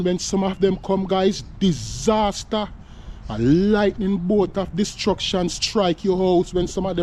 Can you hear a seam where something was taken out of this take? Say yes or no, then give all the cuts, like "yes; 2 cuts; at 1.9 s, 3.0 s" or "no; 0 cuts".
no; 0 cuts